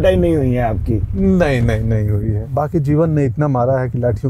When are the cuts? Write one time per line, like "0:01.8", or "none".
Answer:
0:02.4